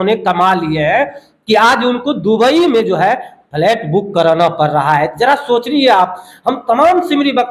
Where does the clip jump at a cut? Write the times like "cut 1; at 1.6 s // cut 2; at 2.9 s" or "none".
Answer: none